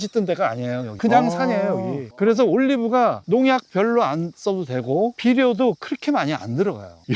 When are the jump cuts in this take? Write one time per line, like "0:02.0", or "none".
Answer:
none